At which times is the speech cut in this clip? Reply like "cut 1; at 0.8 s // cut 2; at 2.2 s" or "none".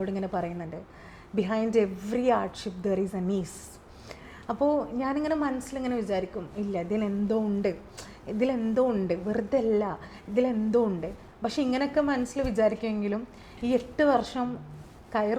none